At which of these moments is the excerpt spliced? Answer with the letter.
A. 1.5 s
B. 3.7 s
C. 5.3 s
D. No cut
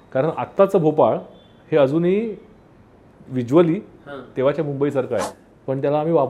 C